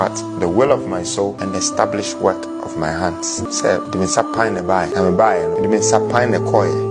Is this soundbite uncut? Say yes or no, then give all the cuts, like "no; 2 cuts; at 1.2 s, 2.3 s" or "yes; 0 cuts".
no; 4 cuts; at 1.4 s, 3.4 s, 4.9 s, 5.6 s